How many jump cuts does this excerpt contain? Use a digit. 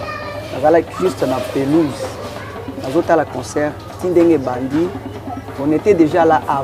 0